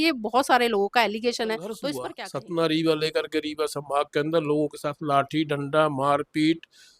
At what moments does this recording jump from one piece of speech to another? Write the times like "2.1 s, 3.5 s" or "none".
2.0 s